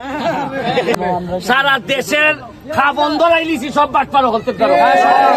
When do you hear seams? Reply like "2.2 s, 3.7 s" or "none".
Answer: 1.0 s